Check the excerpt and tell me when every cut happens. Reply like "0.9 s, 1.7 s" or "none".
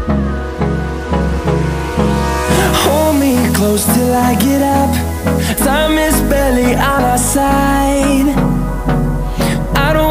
none